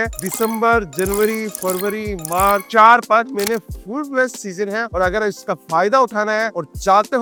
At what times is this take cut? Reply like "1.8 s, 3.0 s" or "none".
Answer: none